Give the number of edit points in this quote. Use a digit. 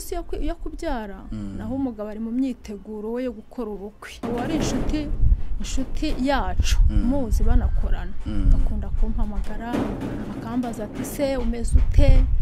1